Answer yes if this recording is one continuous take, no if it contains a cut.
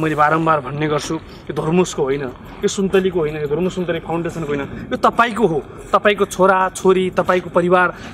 yes